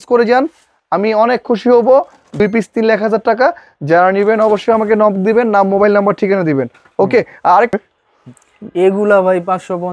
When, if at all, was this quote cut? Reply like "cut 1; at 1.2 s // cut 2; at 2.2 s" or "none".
cut 1; at 2.4 s // cut 2; at 7.8 s